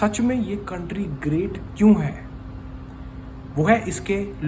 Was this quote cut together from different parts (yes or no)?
no